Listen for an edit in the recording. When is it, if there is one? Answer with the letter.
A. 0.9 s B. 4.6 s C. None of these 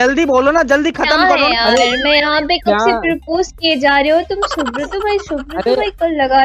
C